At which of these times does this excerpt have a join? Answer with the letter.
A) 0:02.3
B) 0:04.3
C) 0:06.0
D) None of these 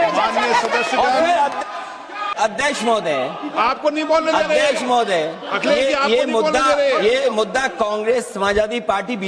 A